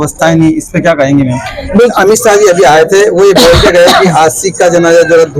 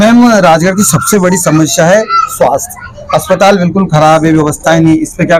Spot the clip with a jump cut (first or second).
first